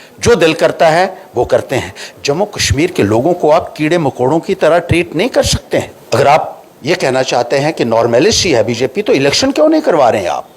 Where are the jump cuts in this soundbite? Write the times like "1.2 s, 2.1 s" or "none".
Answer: 6.0 s